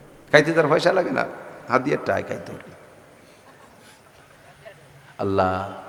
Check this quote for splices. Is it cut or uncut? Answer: uncut